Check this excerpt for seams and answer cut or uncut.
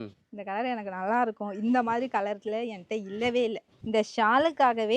cut